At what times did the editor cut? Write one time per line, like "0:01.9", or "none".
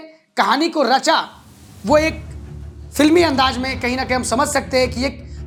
none

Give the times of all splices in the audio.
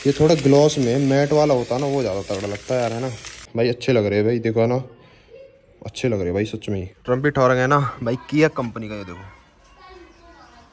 0:03.4
0:07.0

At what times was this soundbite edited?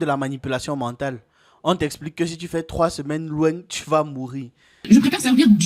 0:04.7

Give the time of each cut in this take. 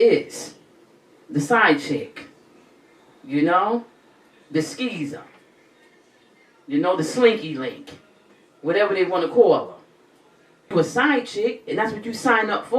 0:10.7

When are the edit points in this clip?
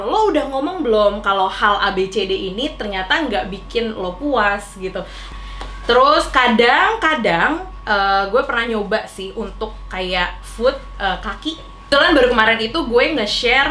0:05.3
0:11.9

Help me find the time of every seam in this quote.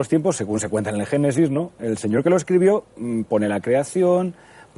0:01.6

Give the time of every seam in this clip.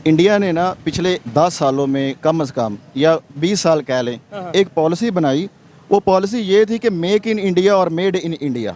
none

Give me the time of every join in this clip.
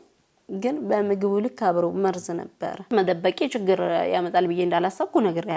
0:02.9

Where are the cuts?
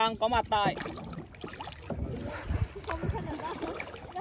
none

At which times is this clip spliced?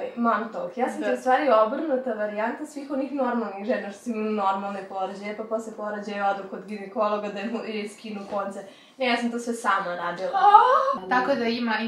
0:10.9

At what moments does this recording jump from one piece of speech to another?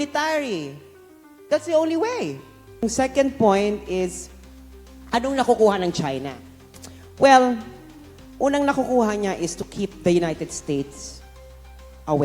0:02.8

